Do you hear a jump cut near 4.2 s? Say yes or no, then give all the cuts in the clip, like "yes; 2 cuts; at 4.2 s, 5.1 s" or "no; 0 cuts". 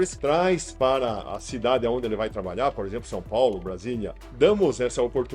yes; 1 cut; at 4.2 s